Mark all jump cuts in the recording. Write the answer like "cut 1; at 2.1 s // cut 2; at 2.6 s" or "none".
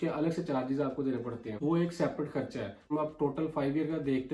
none